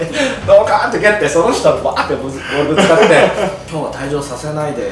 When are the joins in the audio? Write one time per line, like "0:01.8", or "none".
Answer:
0:03.6